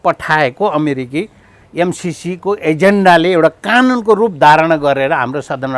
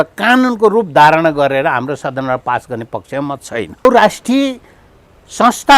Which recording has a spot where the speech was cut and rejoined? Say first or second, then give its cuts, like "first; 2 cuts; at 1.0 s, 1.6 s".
second; 1 cut; at 3.9 s